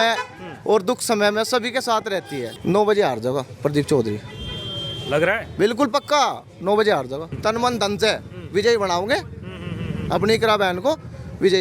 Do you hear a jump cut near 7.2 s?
yes; 2 cuts; at 2.5 s, 7.2 s

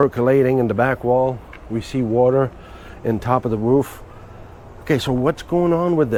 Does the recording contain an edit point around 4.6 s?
no; 0 cuts

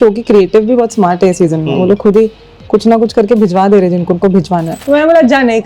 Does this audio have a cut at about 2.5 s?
no; 1 cut; at 4.7 s

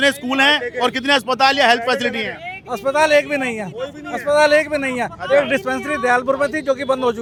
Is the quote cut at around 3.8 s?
no; 0 cuts

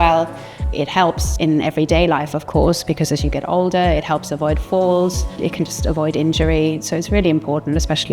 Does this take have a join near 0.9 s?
yes; 2 cuts; at 0.9 s, 5.4 s

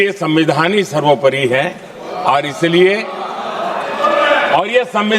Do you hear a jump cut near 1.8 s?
no; 0 cuts

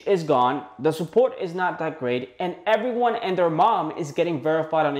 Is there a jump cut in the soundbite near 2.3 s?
no; 0 cuts

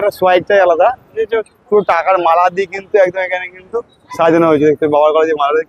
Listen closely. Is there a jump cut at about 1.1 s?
yes; 1 cut; at 1.1 s

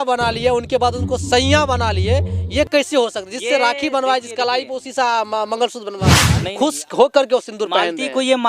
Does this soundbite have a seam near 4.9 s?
no; 1 cut; at 6.3 s

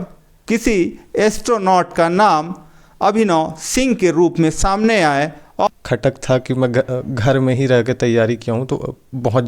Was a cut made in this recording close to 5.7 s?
yes; 1 cut; at 5.7 s

